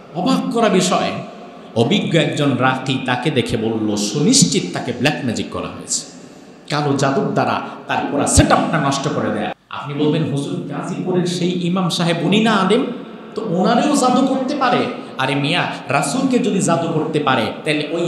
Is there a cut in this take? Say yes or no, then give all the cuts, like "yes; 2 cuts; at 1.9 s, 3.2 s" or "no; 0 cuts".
yes; 1 cut; at 9.6 s